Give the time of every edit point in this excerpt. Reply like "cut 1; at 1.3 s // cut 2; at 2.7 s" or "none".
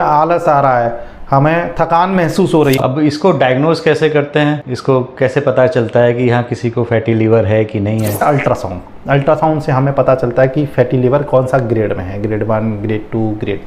cut 1; at 2.8 s // cut 2; at 8.2 s